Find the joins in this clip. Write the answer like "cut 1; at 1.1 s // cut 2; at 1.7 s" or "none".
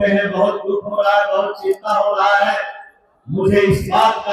none